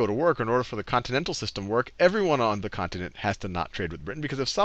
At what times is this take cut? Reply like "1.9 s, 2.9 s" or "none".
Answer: 2.0 s